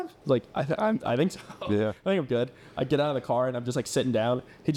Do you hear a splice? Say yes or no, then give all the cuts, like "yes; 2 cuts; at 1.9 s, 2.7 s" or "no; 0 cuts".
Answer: no; 0 cuts